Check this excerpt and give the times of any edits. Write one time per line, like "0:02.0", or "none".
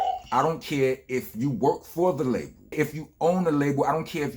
0:02.7